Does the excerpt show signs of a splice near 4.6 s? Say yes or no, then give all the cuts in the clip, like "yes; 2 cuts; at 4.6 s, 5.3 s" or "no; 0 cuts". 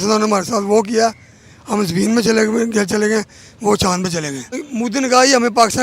yes; 1 cut; at 4.6 s